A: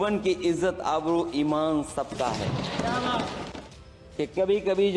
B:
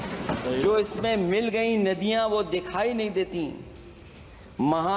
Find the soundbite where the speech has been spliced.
A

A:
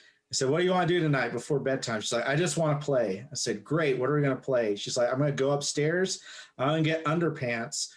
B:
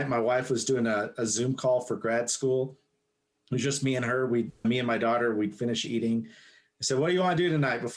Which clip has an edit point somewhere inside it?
B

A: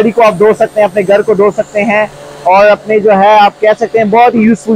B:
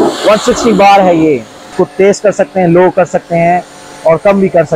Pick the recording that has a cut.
B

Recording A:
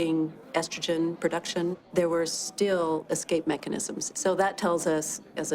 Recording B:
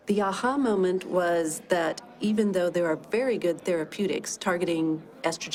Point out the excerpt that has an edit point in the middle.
A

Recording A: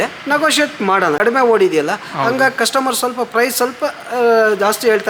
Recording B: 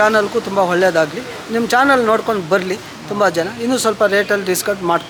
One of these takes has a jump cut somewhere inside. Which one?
A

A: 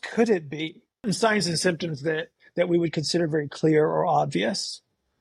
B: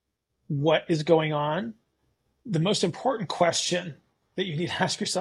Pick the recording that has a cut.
A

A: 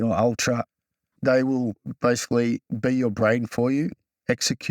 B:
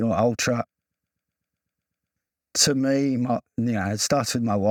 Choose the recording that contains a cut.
A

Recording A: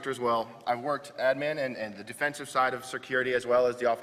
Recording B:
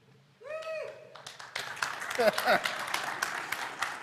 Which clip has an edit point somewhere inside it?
A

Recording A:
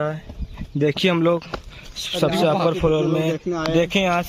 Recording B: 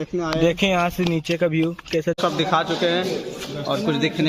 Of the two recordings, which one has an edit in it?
B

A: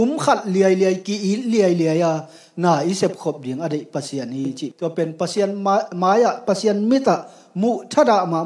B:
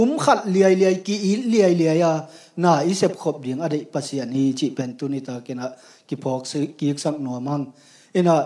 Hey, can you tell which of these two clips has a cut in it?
A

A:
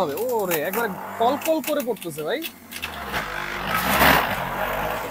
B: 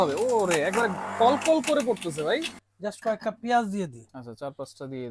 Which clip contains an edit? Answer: B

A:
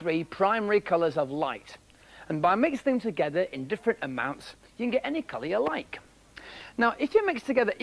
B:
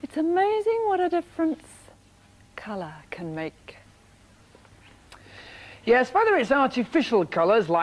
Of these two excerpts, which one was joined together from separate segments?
B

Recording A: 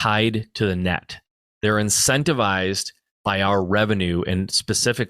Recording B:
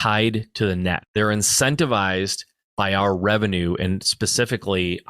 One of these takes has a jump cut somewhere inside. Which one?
B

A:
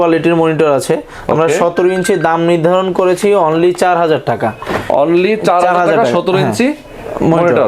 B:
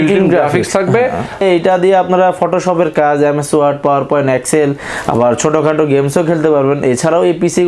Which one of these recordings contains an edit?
B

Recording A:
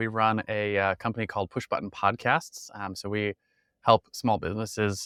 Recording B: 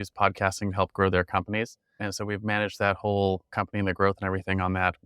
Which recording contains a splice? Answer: B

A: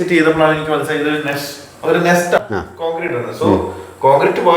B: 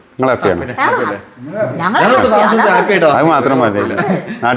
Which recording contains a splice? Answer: A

